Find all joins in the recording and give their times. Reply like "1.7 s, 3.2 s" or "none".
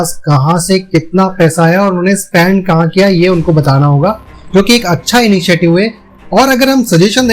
none